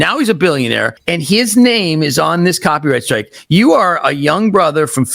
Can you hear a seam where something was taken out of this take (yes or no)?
yes